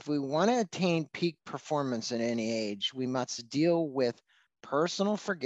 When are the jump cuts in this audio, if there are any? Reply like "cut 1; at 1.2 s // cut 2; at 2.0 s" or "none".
none